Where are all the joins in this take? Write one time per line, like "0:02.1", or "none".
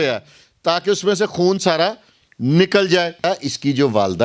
0:03.2